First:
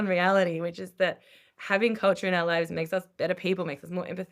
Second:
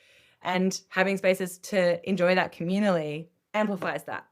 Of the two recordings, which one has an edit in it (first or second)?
second